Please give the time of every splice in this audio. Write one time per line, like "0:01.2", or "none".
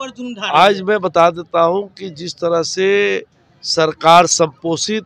none